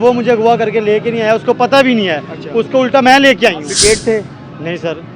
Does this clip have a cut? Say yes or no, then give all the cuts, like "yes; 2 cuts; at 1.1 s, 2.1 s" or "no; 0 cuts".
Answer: yes; 1 cut; at 3.7 s